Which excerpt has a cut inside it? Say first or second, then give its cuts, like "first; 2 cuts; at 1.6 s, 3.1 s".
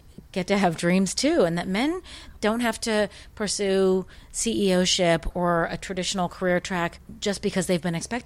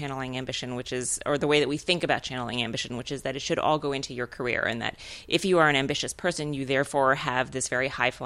first; 3 cuts; at 2.2 s, 5.3 s, 7.1 s